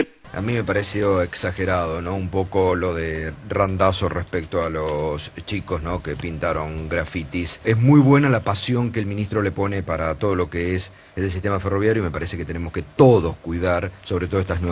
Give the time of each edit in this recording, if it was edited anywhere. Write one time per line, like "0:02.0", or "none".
none